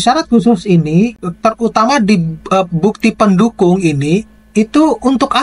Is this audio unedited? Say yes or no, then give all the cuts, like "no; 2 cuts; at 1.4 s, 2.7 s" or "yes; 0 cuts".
yes; 0 cuts